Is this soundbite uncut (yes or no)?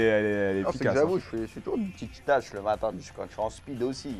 no